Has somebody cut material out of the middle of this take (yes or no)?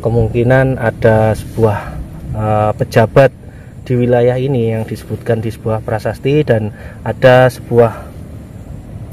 no